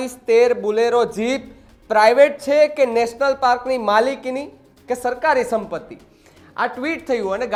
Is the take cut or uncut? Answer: uncut